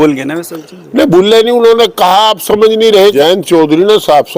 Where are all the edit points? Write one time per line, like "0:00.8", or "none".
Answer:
0:03.1